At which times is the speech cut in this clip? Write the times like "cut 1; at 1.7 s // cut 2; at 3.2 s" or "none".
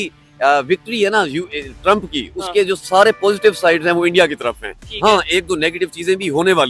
none